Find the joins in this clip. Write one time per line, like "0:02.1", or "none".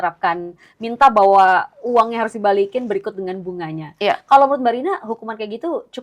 none